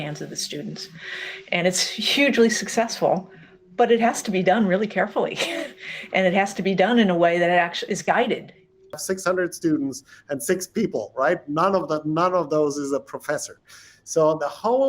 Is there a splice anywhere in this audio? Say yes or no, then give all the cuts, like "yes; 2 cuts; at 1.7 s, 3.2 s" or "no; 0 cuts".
yes; 1 cut; at 9.0 s